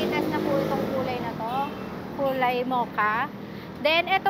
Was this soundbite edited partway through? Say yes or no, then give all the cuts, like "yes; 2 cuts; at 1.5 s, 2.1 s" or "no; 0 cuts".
no; 0 cuts